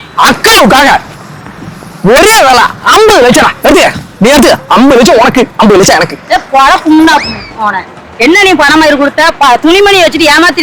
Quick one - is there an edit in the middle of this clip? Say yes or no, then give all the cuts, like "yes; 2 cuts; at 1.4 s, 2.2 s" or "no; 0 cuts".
no; 0 cuts